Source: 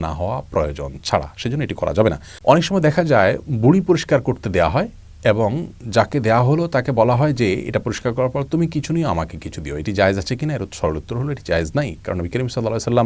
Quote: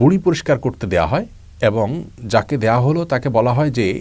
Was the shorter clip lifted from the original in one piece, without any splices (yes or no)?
yes